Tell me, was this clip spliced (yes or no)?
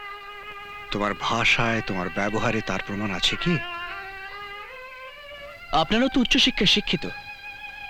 no